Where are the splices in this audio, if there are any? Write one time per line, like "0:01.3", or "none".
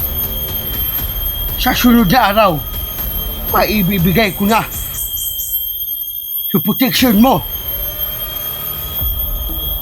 0:01.6
0:07.5